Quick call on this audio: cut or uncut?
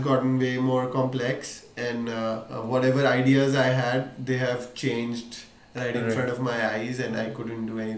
uncut